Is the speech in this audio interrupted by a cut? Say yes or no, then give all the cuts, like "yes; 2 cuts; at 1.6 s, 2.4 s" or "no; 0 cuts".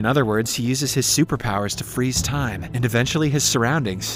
no; 0 cuts